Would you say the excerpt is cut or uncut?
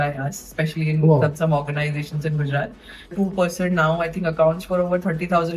cut